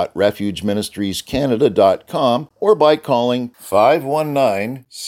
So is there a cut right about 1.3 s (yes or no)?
no